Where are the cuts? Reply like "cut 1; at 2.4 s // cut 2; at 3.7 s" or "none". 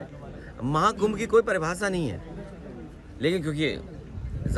none

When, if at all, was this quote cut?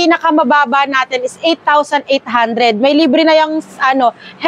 none

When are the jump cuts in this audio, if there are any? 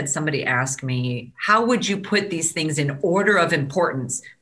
cut 1; at 1.3 s

